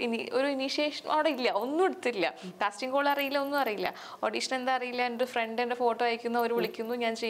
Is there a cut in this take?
no; 0 cuts

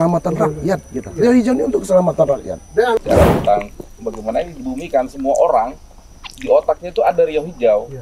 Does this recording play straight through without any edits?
no; 1 cut; at 3.0 s

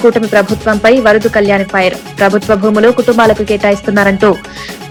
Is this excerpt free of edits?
yes; 0 cuts

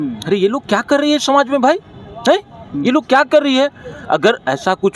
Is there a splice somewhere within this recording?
no; 0 cuts

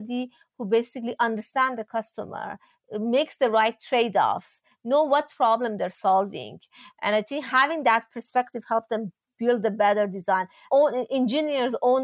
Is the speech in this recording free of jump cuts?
no; 1 cut; at 10.7 s

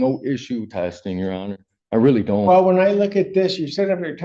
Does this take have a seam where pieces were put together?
no; 0 cuts

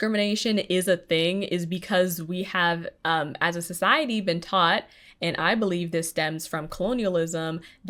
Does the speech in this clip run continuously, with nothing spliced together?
yes; 0 cuts

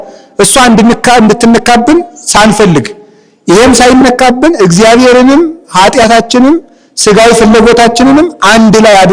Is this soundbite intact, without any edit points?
yes; 0 cuts

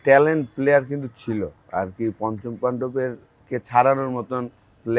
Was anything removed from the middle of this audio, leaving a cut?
no; 0 cuts

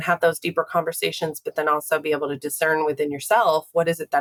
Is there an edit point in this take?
no; 0 cuts

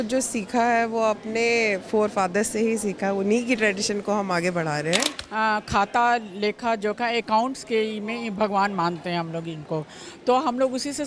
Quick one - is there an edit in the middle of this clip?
yes; 1 cut; at 5.2 s

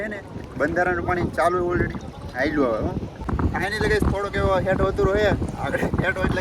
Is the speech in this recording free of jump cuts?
no; 1 cut; at 3.2 s

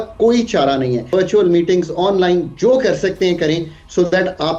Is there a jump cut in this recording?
yes; 1 cut; at 1.1 s

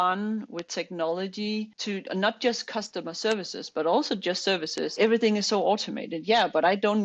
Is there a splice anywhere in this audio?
yes; 2 cuts; at 1.8 s, 4.9 s

